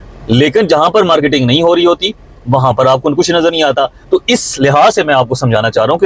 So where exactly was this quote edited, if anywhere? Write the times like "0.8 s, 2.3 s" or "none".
none